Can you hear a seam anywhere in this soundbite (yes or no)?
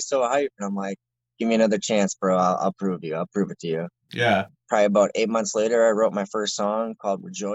no